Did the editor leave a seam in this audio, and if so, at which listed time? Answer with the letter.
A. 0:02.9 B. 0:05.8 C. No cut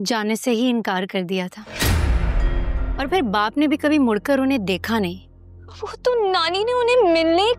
A